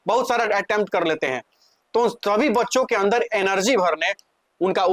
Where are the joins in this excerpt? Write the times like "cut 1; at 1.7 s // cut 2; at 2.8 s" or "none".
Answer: none